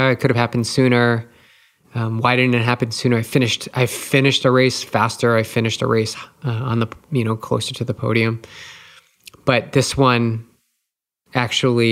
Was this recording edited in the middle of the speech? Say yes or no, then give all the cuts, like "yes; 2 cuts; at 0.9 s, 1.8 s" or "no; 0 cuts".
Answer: no; 0 cuts